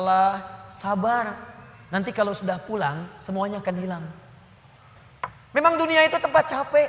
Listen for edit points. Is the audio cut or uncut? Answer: cut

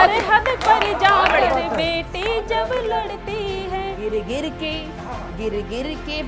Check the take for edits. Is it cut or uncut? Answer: cut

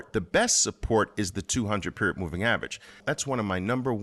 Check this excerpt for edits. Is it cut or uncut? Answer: cut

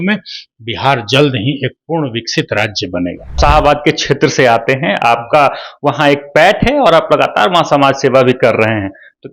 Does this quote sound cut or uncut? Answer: cut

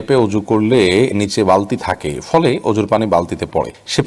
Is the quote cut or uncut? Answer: uncut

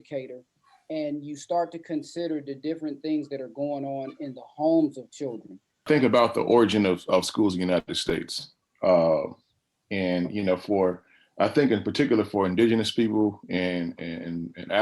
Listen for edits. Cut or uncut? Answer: cut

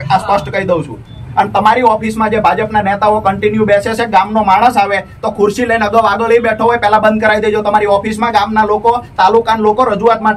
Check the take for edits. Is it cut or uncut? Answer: uncut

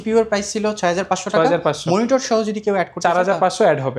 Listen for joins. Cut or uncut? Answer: uncut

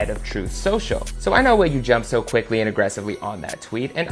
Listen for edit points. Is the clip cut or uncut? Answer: uncut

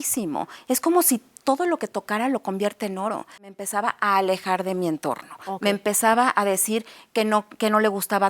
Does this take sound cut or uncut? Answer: cut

